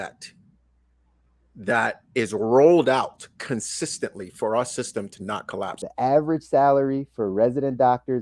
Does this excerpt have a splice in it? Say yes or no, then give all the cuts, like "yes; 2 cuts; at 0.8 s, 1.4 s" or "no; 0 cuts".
yes; 1 cut; at 5.8 s